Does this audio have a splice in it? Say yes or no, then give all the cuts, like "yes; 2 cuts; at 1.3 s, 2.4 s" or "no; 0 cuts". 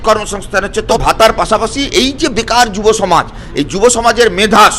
yes; 1 cut; at 1.0 s